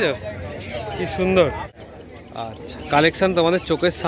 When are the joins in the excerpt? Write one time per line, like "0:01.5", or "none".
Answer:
0:01.7

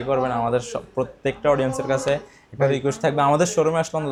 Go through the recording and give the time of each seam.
none

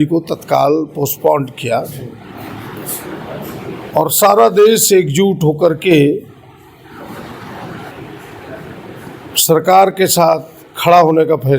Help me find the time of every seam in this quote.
none

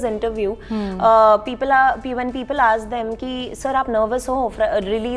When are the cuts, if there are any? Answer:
none

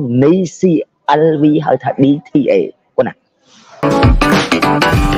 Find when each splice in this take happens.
0:03.8

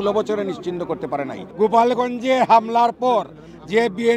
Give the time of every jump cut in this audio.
0:01.4

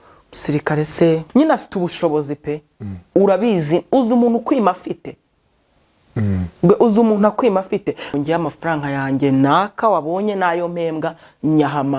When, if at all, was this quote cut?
0:01.2
0:08.1

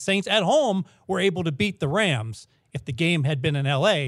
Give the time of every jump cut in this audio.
none

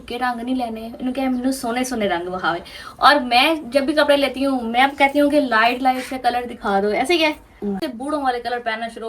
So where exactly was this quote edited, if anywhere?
0:07.9

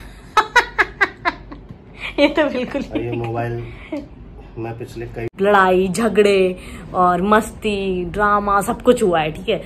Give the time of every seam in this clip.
0:05.3

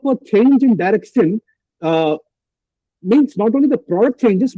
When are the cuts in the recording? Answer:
none

